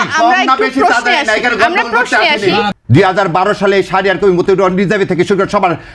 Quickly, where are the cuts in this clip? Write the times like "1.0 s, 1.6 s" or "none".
2.7 s